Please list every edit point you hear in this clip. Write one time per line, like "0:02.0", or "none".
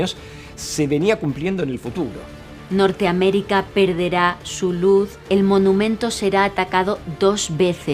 0:02.6
0:05.2